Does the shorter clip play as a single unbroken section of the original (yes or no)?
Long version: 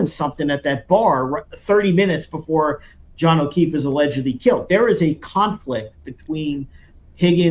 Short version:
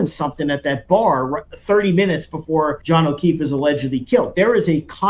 no